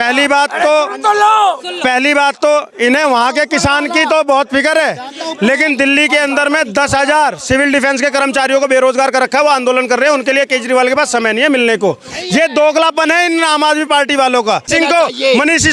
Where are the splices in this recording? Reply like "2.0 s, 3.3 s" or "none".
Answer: 14.7 s